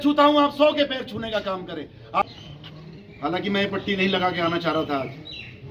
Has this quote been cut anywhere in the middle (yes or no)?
yes